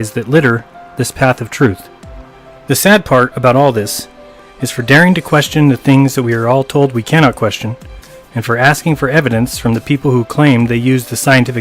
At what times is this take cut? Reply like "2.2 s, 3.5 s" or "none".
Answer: 1.6 s